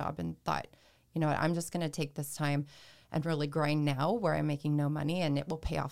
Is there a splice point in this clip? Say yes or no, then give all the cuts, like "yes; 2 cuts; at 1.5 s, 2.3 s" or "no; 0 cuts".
no; 0 cuts